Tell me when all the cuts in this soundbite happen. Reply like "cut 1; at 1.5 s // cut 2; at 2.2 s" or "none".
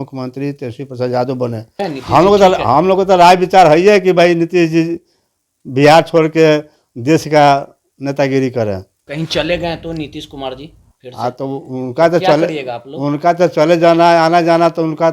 cut 1; at 1.8 s // cut 2; at 9.0 s

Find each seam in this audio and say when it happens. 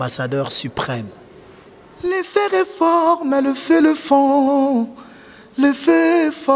cut 1; at 1.9 s

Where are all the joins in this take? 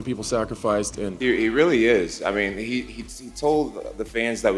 cut 1; at 1.1 s

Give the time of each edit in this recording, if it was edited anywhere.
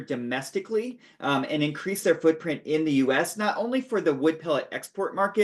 none

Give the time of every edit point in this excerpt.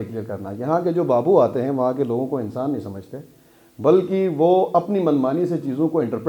none

